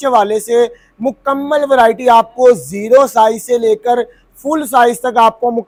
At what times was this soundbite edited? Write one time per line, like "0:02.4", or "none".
none